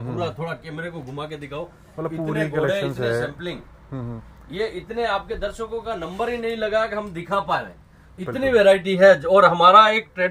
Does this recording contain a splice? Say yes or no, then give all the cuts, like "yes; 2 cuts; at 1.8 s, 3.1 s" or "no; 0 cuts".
no; 0 cuts